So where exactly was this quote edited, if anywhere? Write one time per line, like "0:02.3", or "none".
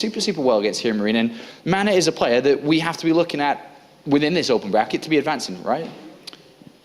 0:01.5